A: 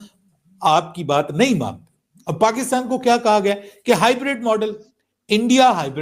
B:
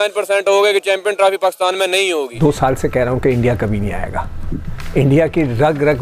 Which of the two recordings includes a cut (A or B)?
B